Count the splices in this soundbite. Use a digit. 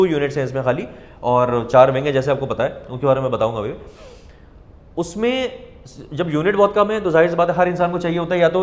0